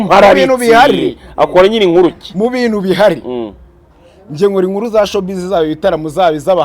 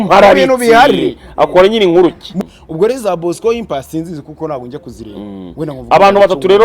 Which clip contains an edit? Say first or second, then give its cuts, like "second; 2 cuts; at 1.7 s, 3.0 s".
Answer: second; 1 cut; at 2.3 s